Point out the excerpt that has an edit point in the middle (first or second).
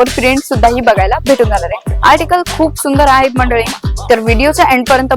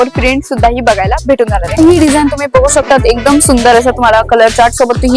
second